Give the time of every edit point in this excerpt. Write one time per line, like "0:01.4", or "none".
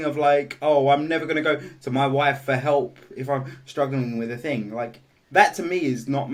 none